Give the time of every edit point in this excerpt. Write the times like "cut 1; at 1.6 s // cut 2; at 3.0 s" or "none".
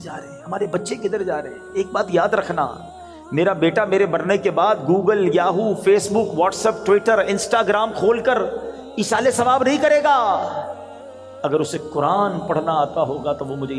none